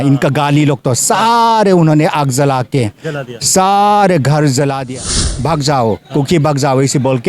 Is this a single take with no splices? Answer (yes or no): no